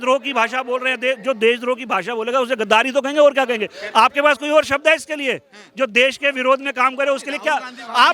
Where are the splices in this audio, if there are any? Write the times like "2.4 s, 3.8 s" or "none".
none